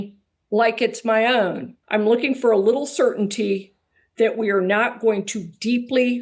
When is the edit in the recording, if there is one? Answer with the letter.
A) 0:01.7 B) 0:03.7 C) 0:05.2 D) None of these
A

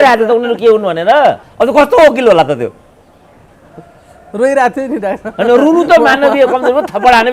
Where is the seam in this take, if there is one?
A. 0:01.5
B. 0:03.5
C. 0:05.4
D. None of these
A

